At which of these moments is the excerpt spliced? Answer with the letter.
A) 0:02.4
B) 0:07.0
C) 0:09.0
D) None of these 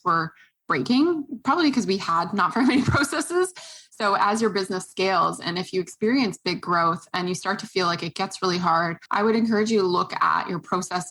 C